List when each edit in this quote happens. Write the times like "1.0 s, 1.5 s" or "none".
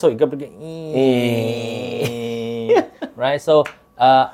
none